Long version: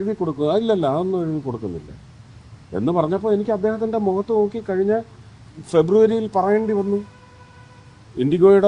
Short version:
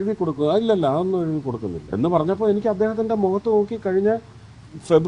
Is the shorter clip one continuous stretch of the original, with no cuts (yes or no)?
no